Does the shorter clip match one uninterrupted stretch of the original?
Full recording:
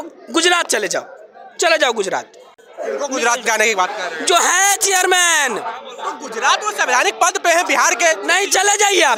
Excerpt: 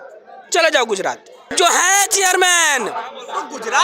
no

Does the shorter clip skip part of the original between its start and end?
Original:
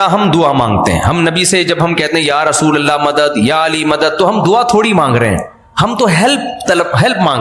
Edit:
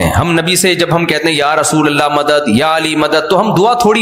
no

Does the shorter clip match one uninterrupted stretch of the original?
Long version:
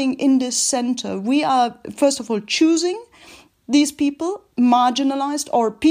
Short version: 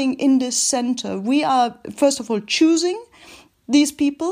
yes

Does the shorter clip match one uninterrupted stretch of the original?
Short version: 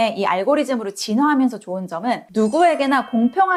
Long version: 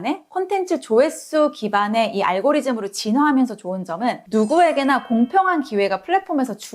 yes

